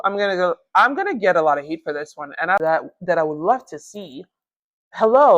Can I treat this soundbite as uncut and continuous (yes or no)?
no